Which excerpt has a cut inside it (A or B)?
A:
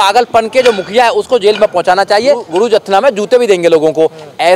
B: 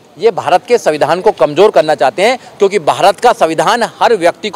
A